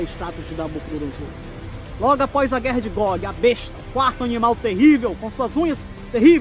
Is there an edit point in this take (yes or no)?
yes